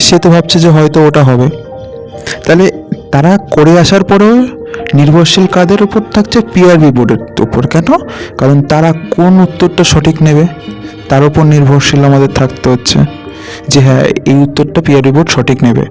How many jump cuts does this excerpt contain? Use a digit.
0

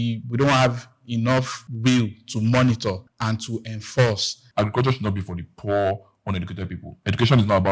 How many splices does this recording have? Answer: 3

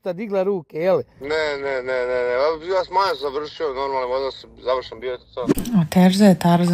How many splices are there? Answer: 1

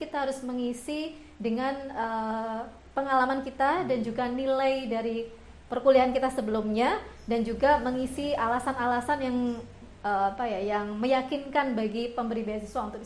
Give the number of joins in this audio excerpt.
0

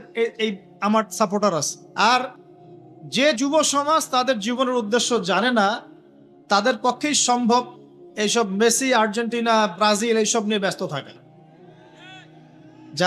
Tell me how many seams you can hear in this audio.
1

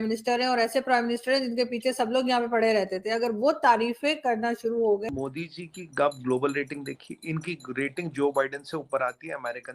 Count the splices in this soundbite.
1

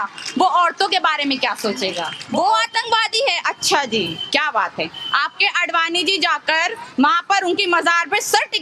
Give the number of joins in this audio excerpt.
1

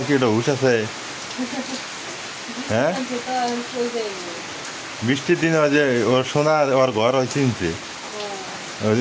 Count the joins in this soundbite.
0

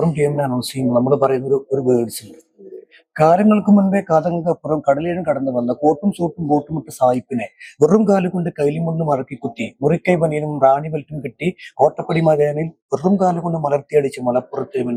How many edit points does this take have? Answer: 0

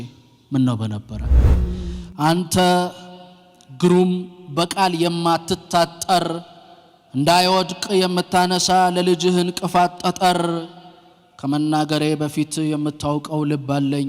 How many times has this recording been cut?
1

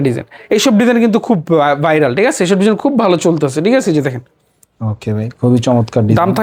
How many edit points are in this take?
0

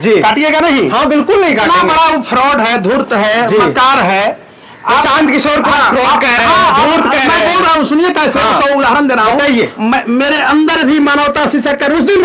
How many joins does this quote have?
0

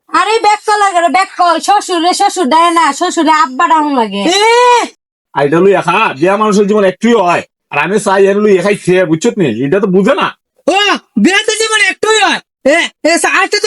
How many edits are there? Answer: 1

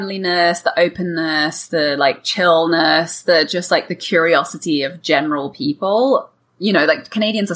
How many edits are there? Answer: 0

